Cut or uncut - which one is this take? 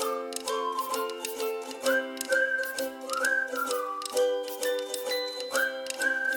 uncut